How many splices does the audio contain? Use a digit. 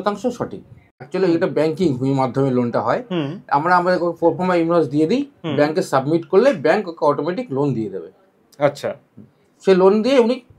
1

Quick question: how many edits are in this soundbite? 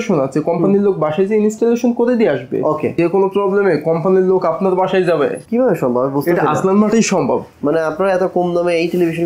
2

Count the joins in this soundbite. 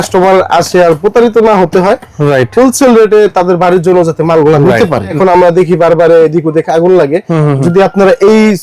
1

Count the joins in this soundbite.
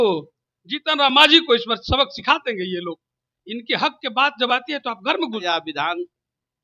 1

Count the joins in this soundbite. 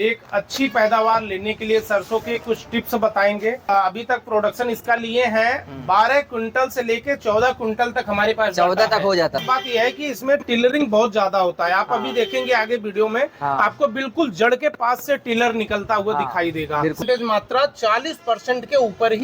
3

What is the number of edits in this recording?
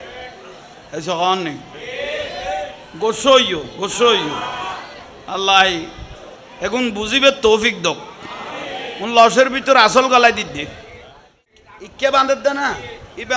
1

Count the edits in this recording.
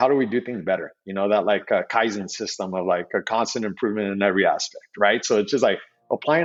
0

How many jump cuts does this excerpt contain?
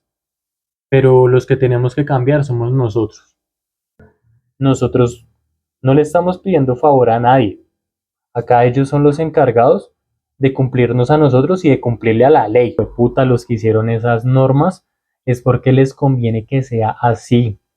2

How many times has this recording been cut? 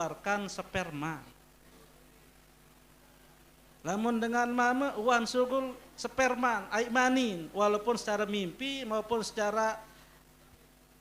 0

